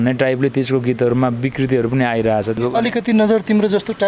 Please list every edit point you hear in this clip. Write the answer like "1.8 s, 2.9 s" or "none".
2.6 s